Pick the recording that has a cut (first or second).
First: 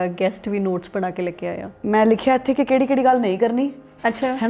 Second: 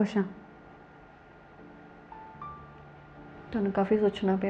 first